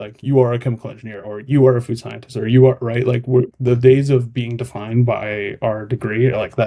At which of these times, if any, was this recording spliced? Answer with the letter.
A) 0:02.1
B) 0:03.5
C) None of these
B